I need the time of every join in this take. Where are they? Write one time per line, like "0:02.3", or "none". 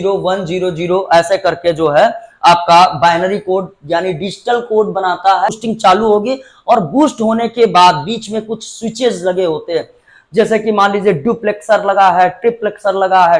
0:05.6